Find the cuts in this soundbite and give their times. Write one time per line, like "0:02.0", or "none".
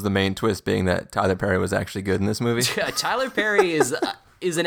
none